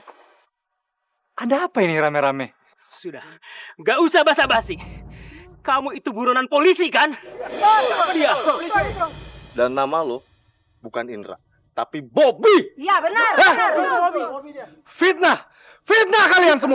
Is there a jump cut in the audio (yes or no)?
no